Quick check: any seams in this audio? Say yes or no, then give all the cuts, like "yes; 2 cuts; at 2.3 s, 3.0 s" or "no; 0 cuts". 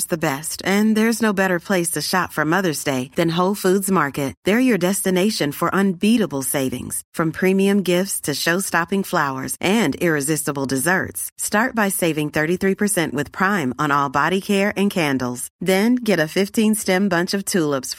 no; 0 cuts